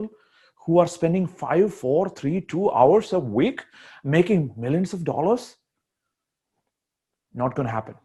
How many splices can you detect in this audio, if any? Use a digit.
0